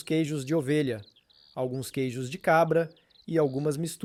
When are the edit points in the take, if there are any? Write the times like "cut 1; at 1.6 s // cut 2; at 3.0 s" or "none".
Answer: none